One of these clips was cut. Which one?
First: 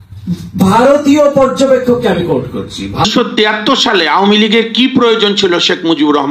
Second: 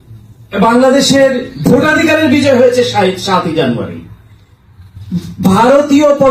first; 1 cut; at 3.0 s

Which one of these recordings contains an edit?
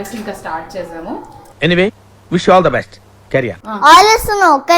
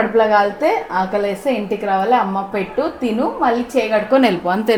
first; 1 cut; at 3.6 s

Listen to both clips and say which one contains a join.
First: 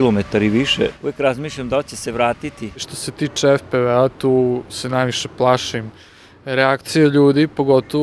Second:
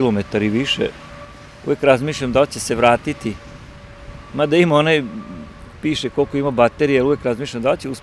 first; 2 cuts; at 1.0 s, 3.0 s

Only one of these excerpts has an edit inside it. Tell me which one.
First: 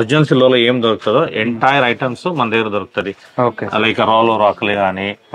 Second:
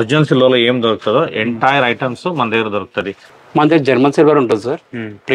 second; 1 cut; at 3.2 s

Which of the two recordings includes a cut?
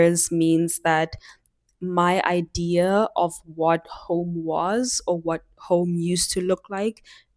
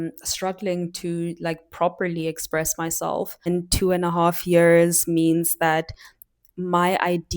second; 1 cut; at 3.5 s

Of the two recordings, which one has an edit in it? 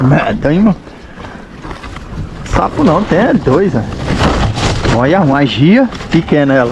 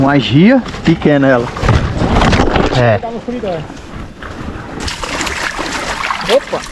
second; 1 cut; at 4.9 s

